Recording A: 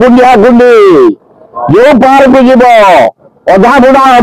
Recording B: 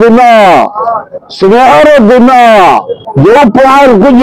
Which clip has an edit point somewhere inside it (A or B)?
B